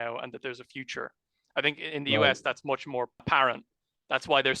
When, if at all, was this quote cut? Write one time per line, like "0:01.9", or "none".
0:03.2

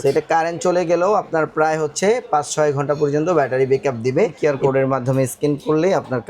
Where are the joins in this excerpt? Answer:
0:04.3

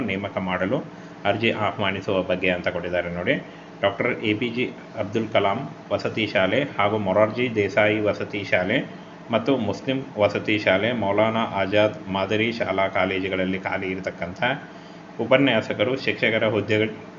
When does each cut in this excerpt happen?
none

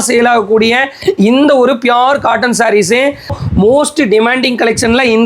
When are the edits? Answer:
0:03.4

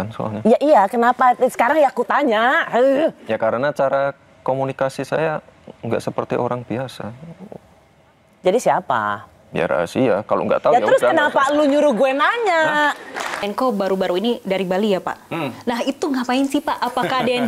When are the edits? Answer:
0:13.4

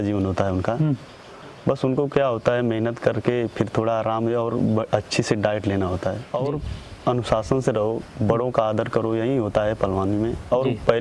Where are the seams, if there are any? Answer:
0:06.3

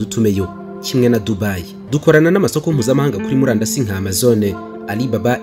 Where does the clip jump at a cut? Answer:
0:01.7

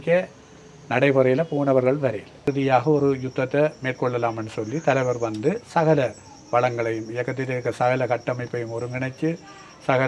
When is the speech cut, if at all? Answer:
0:02.5

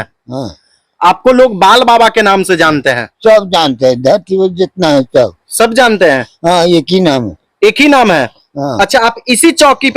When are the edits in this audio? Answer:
none

